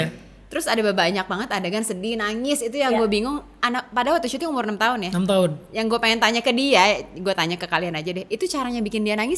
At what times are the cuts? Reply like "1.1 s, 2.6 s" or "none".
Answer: none